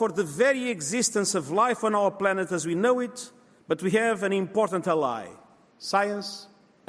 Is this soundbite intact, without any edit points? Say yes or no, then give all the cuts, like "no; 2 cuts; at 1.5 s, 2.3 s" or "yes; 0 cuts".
yes; 0 cuts